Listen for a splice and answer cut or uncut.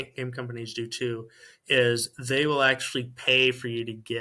uncut